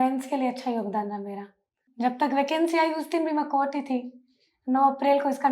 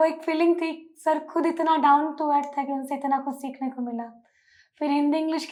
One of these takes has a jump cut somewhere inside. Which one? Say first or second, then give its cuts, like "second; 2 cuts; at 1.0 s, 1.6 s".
first; 1 cut; at 1.8 s